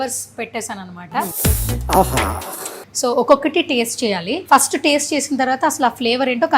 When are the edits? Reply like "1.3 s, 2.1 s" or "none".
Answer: 1.3 s, 2.8 s, 4.3 s